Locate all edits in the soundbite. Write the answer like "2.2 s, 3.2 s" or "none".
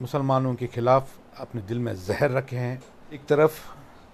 3.2 s

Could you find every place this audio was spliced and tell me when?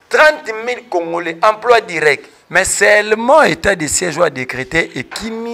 2.3 s

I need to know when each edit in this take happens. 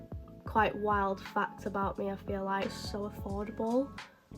2.7 s

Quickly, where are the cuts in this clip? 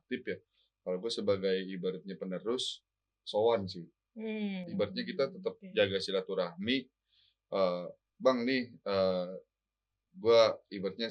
none

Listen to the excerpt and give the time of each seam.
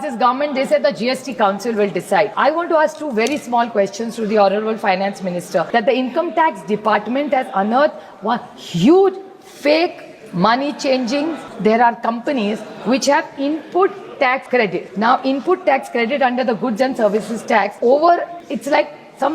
2.3 s, 5.7 s, 11.5 s, 14.6 s, 17.7 s, 18.4 s

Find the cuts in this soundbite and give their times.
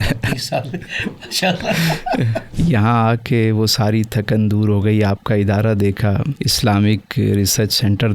2.4 s

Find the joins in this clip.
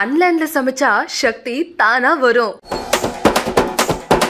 2.6 s

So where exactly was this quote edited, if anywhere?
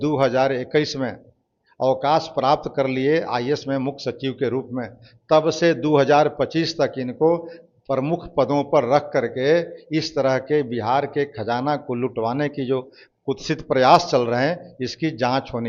none

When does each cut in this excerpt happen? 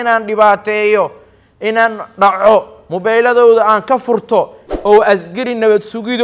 4.6 s

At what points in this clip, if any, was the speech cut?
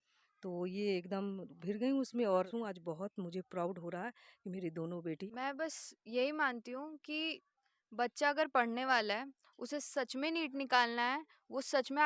2.5 s, 5.2 s

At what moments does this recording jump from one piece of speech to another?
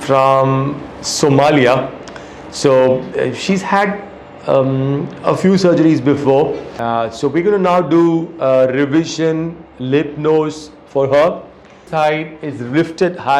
6.7 s, 11.8 s

